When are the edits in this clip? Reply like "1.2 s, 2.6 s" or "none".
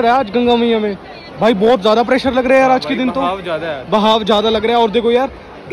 none